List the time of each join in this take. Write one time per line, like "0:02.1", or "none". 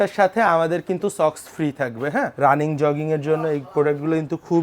0:02.3